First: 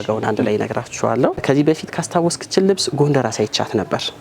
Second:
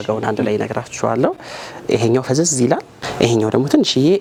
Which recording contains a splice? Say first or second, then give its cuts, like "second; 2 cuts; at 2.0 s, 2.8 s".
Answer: first; 1 cut; at 1.4 s